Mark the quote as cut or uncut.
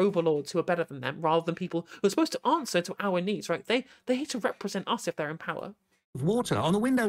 uncut